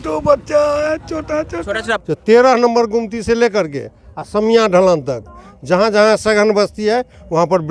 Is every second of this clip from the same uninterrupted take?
no; 1 cut; at 1.9 s

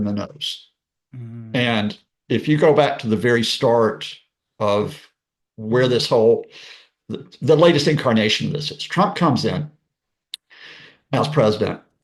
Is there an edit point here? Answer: no; 0 cuts

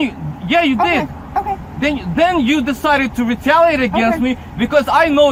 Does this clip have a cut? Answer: no; 0 cuts

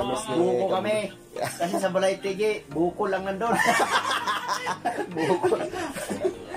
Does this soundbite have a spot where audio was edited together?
no; 0 cuts

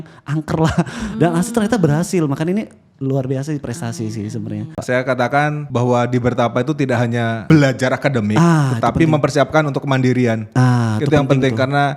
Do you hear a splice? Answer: yes; 3 cuts; at 4.8 s, 5.6 s, 7.5 s

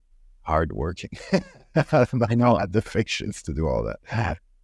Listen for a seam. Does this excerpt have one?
no; 0 cuts

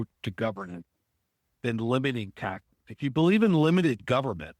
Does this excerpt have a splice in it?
no; 0 cuts

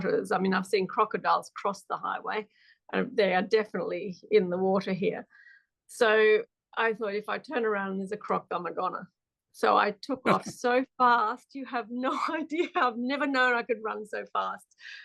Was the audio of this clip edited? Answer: no; 0 cuts

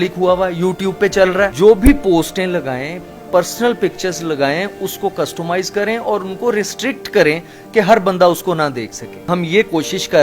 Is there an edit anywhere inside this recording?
no; 0 cuts

